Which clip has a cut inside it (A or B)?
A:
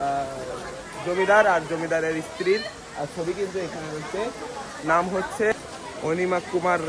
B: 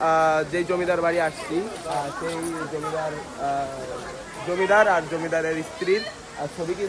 A